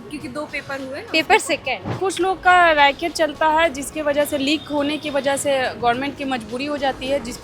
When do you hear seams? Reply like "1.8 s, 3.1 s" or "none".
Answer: 1.9 s